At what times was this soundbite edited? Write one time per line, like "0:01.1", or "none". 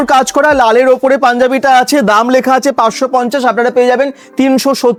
none